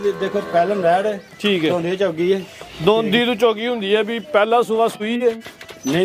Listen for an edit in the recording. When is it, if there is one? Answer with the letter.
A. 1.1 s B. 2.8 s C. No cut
C